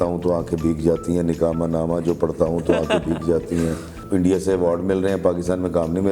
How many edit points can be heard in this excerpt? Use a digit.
1